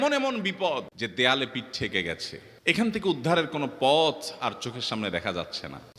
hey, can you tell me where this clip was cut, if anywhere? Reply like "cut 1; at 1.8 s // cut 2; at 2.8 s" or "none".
none